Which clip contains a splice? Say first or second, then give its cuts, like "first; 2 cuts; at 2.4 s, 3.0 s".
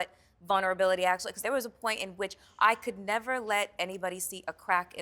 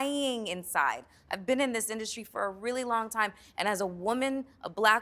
first; 1 cut; at 1.4 s